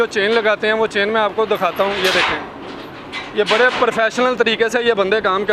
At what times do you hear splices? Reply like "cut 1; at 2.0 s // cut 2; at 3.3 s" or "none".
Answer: none